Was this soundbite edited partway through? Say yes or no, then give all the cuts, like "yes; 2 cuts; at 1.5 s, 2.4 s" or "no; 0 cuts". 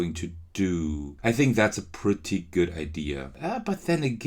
yes; 2 cuts; at 1.1 s, 3.3 s